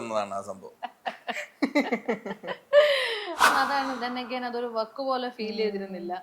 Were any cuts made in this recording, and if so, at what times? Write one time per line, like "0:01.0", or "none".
0:03.4